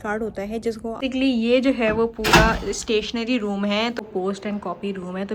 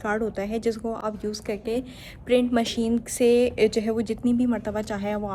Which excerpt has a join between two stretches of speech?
first; 2 cuts; at 1.0 s, 4.0 s

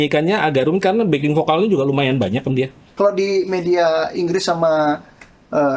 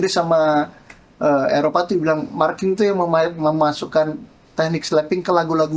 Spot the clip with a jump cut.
first; 1 cut; at 2.8 s

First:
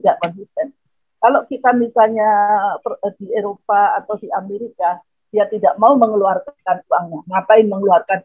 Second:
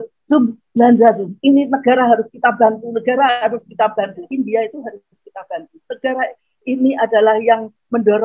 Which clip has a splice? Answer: second; 1 cut; at 4.3 s

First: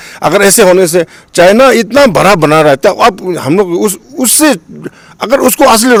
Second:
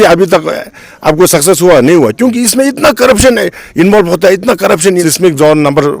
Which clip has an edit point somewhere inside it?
second; 1 cut; at 5.1 s

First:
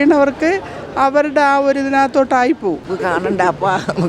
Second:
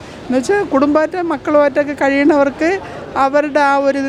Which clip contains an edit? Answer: first; 1 cut; at 2.9 s

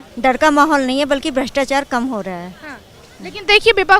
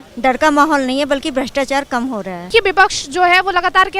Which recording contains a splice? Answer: second; 1 cut; at 2.5 s

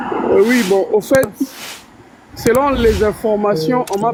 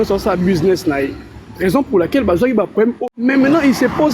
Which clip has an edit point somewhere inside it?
second; 1 cut; at 3.0 s

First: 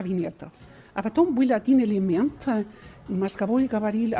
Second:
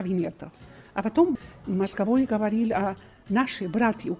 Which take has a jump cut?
second; 1 cut; at 1.3 s

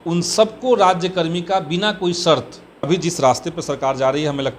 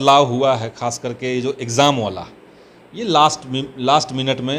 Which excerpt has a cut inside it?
first; 1 cut; at 2.9 s

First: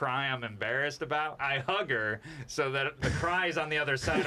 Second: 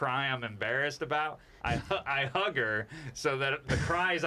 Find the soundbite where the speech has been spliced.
first; 1 cut; at 1.4 s

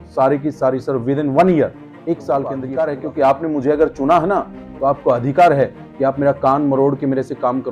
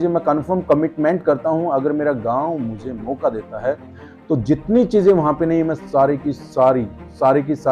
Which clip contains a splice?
first; 1 cut; at 2.6 s

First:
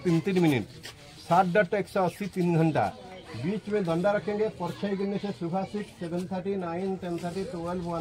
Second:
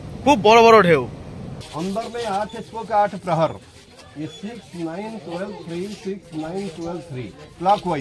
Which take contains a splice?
second; 1 cut; at 1.6 s

